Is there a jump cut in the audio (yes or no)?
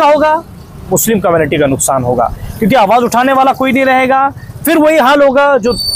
no